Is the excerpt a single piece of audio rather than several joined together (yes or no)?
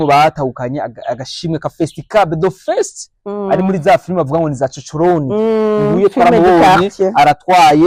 yes